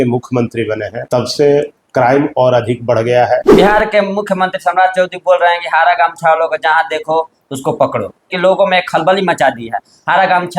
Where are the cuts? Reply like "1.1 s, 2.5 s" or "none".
0.9 s, 3.5 s, 8.3 s